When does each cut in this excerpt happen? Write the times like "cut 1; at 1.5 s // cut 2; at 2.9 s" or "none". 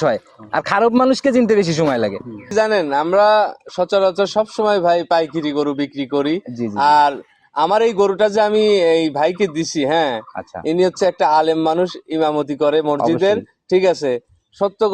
cut 1; at 2.5 s